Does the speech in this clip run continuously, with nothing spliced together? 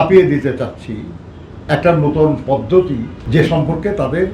no; 1 cut; at 3.1 s

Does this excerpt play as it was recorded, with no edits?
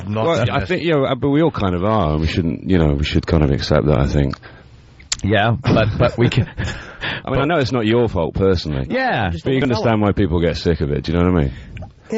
no; 1 cut; at 1.2 s

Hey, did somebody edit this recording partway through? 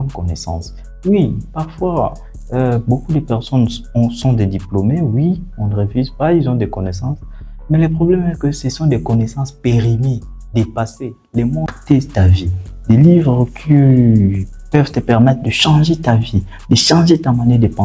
yes; 1 cut; at 11.7 s

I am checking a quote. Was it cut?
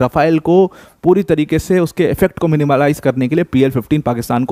no; 0 cuts

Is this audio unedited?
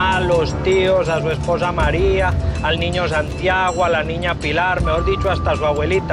yes; 0 cuts

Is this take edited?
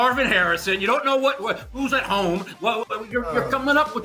no; 0 cuts

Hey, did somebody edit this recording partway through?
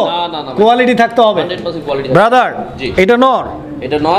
no; 0 cuts

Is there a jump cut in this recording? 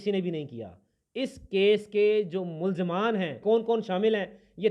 yes; 1 cut; at 3.4 s

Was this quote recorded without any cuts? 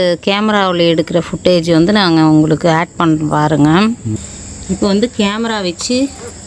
no; 1 cut; at 4.1 s

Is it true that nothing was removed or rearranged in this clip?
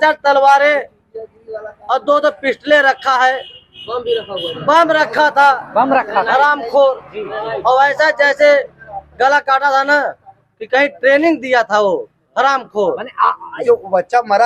no; 1 cut; at 13.5 s

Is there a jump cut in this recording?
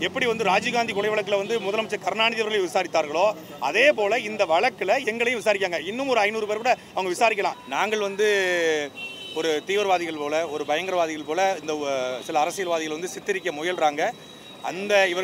yes; 1 cut; at 7.6 s

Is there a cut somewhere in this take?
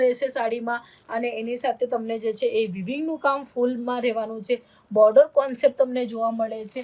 no; 0 cuts

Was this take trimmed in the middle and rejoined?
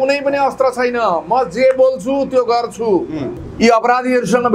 yes; 1 cut; at 3.4 s

